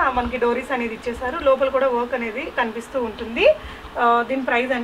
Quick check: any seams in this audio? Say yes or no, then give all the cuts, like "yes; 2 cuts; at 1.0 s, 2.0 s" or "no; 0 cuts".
no; 0 cuts